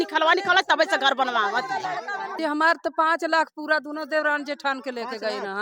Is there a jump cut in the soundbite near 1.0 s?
no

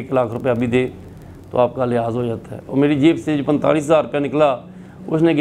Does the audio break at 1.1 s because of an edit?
no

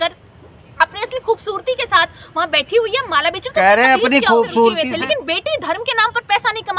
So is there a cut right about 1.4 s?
no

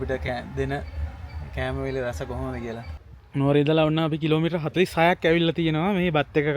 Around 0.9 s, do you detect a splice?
no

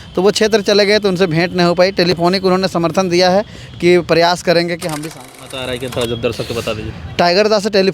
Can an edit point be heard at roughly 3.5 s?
no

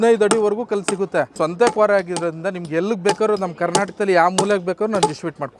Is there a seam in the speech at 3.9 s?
no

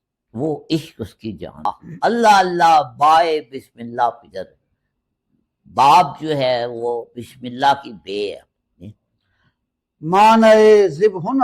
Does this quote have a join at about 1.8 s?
yes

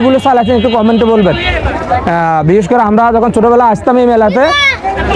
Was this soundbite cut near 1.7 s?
no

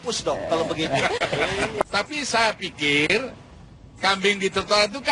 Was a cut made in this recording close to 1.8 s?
yes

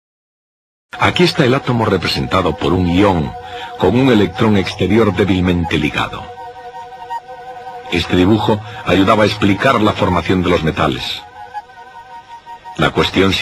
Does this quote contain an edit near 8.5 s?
no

